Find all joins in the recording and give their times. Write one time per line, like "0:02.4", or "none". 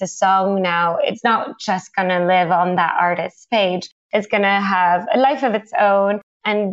0:01.2